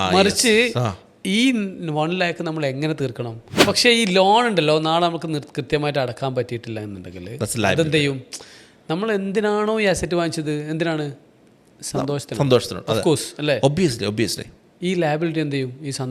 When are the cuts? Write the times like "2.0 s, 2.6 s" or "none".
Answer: 3.5 s